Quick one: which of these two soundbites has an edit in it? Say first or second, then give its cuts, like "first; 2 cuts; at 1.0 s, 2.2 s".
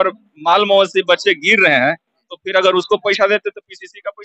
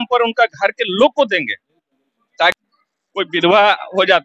second; 1 cut; at 2.5 s